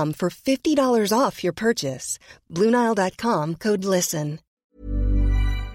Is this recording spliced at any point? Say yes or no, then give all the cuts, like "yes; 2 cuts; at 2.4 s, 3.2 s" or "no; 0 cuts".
yes; 1 cut; at 4.5 s